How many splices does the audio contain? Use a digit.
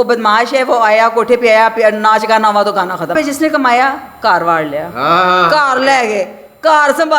1